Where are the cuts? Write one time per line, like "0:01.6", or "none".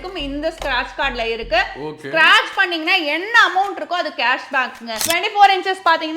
0:05.0